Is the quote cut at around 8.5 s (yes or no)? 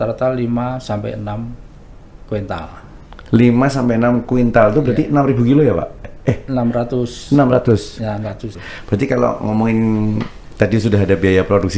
yes